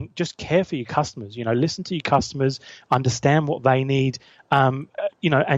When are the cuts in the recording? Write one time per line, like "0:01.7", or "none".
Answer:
none

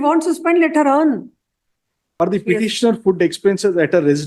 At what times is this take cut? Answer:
0:02.2

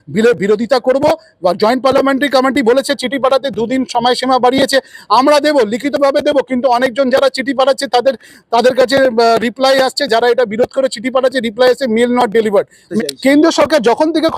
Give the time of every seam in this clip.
0:12.9

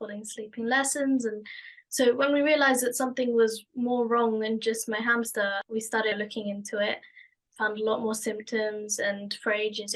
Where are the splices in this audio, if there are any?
none

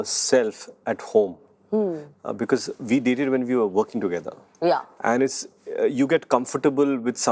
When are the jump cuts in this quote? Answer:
none

